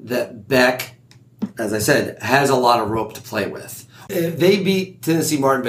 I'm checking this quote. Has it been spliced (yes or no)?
yes